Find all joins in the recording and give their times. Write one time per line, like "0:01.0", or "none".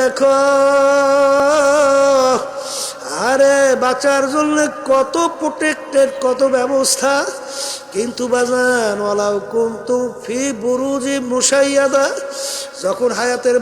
0:01.4